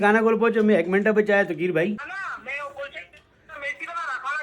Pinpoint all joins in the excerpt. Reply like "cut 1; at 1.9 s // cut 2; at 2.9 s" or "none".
cut 1; at 2.0 s